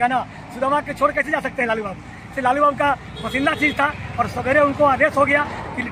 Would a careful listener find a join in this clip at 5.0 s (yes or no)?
no